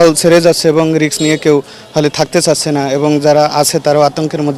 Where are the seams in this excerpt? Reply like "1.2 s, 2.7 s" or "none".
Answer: none

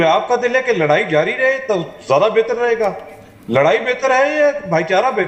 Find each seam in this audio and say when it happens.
none

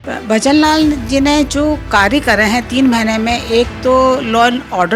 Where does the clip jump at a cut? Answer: none

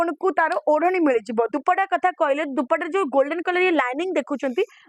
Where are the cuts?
none

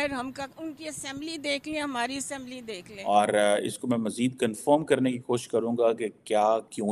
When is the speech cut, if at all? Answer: 3.1 s

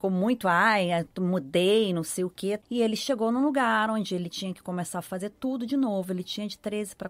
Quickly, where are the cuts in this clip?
2.6 s

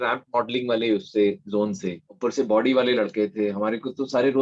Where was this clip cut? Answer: none

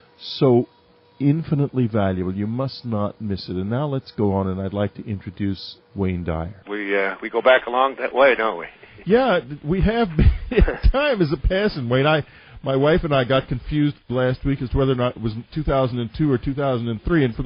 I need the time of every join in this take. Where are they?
8.1 s

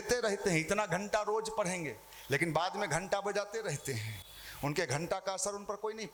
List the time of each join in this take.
none

